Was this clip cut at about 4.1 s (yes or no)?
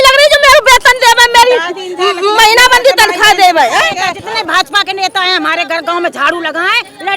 yes